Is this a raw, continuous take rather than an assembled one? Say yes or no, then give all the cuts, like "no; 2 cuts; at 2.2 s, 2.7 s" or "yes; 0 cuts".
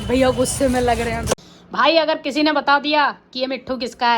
no; 1 cut; at 1.4 s